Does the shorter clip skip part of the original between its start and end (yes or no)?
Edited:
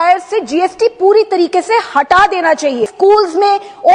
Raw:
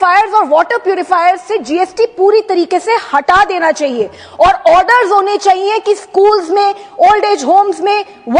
yes